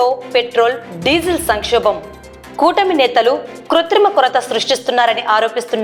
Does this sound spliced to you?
no; 0 cuts

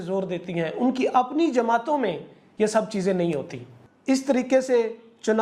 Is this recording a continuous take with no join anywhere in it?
yes; 0 cuts

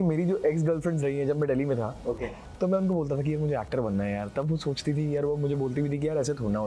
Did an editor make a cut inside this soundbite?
no; 0 cuts

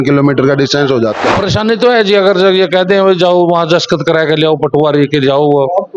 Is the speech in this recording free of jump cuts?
no; 1 cut; at 1.2 s

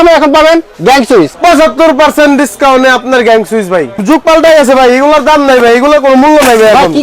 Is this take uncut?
no; 2 cuts; at 1.3 s, 4.0 s

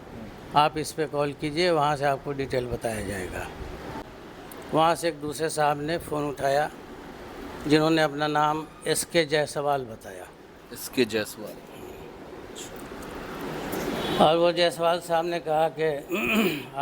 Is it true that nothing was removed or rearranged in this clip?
no; 1 cut; at 4.0 s

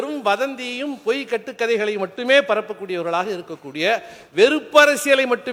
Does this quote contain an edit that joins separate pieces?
no; 0 cuts

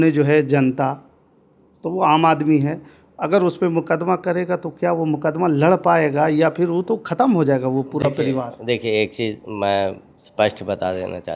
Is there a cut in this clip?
no; 0 cuts

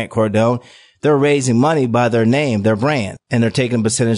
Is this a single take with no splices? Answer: no; 1 cut; at 3.2 s

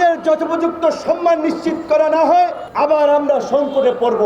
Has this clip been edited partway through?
yes; 1 cut; at 2.6 s

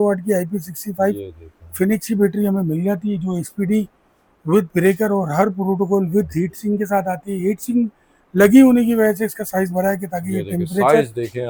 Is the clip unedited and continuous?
yes; 0 cuts

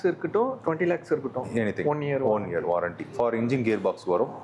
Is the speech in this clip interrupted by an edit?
no; 0 cuts

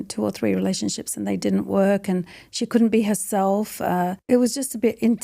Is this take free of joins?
yes; 0 cuts

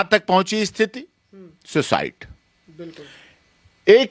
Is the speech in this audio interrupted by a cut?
no; 0 cuts

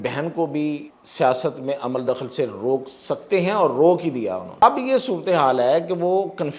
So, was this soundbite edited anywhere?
yes; 2 cuts; at 1.0 s, 4.5 s

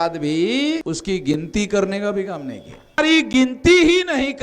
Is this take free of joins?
no; 2 cuts; at 0.8 s, 3.0 s

